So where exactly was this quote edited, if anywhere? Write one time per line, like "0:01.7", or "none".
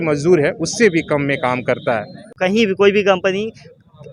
0:02.3